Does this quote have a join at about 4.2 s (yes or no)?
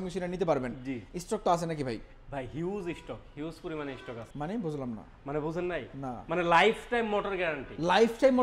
yes